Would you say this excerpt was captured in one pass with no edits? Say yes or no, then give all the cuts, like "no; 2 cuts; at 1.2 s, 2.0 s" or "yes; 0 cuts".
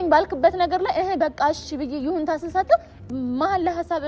no; 1 cut; at 2.9 s